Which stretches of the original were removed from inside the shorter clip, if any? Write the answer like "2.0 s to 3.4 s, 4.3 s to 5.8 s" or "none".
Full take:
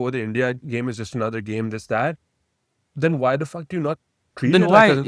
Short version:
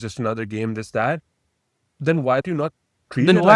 3.4 s to 3.7 s